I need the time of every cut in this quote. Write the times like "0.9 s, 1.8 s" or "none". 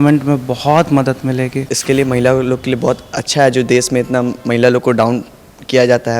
1.7 s